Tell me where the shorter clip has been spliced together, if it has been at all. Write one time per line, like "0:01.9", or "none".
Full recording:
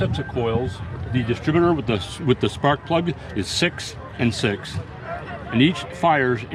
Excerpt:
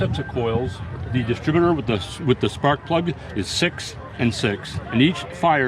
0:04.8